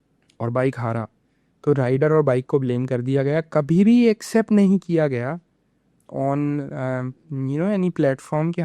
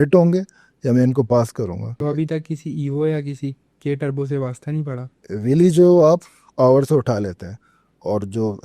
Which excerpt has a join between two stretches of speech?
second; 2 cuts; at 2.0 s, 5.3 s

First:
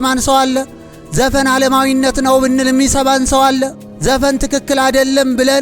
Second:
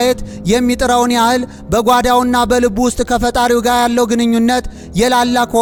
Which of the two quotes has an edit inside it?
first; 1 cut; at 3.9 s

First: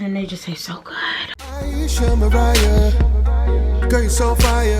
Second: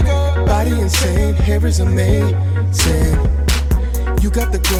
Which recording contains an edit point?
first; 1 cut; at 1.3 s

